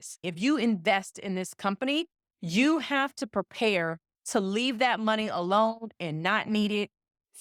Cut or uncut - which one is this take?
uncut